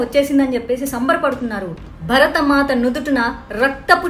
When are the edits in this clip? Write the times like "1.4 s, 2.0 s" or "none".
1.9 s